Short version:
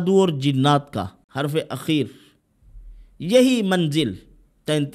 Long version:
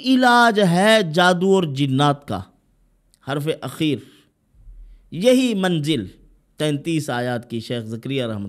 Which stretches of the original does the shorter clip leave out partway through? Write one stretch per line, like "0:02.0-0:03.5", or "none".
0:02.5-0:03.1